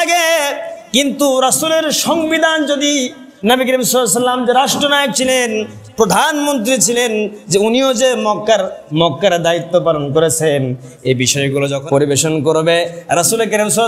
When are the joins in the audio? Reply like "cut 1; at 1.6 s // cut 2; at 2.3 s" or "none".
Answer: cut 1; at 11.8 s